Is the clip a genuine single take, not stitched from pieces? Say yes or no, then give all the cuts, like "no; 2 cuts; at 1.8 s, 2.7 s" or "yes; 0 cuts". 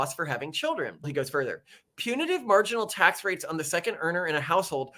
no; 1 cut; at 1.1 s